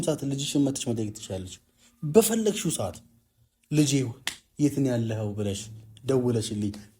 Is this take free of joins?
yes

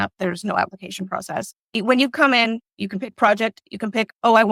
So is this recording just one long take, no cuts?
yes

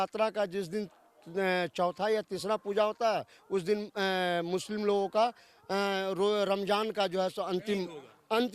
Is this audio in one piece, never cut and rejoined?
yes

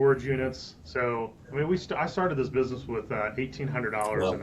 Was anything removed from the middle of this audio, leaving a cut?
yes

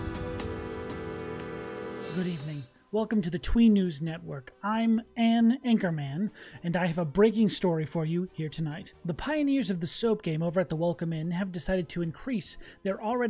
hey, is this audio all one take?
no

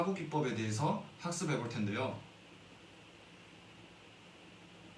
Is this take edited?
no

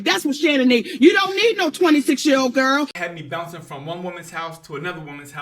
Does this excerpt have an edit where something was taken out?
yes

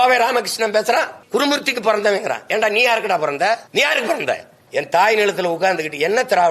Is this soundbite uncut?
no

